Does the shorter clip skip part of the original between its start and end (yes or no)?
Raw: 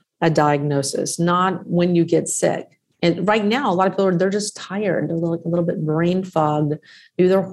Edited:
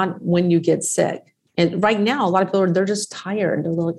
no